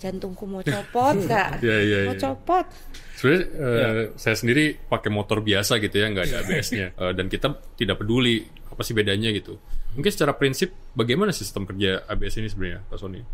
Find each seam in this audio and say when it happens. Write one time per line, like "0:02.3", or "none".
none